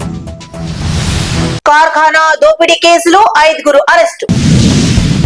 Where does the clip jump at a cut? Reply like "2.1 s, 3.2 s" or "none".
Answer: 1.5 s

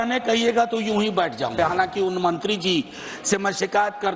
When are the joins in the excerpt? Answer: 1.6 s

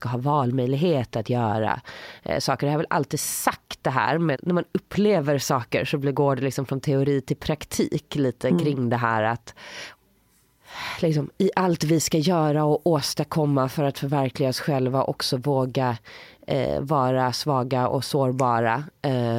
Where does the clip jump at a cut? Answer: none

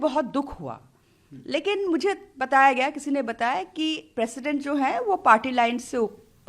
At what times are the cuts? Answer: none

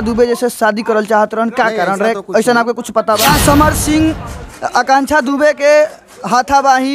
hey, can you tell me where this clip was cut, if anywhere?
3.2 s

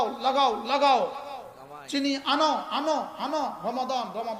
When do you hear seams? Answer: none

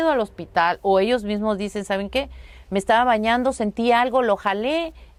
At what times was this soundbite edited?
none

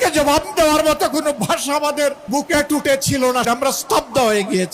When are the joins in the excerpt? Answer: 2.2 s, 3.5 s

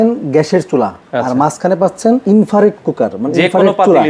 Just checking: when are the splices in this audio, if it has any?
1.0 s, 2.2 s

